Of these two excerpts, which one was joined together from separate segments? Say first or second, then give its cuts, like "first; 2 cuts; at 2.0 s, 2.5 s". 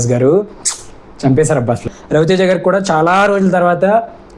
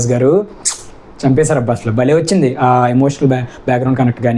first; 1 cut; at 1.9 s